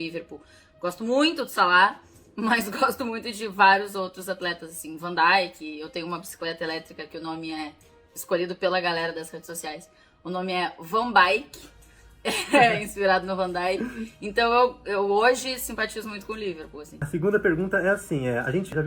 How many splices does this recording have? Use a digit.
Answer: 1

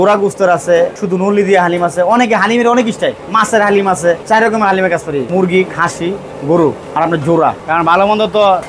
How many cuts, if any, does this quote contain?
4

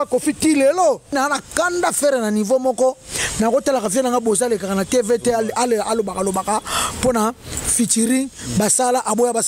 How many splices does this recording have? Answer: 1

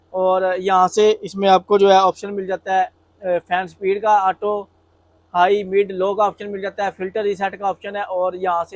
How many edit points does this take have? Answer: 0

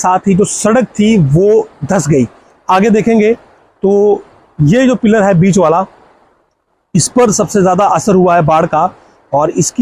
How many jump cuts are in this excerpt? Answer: 0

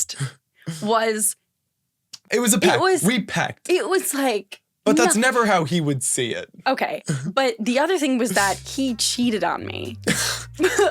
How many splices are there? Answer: 1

